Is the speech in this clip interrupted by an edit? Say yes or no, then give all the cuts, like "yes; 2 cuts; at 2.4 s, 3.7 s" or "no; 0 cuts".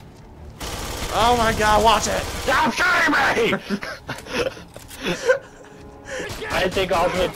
yes; 1 cut; at 6.3 s